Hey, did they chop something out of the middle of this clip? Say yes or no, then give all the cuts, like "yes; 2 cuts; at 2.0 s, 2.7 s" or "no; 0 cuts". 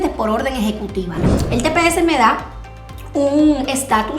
yes; 1 cut; at 1.2 s